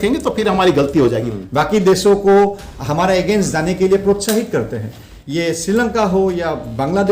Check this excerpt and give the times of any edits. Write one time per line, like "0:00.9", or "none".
0:01.3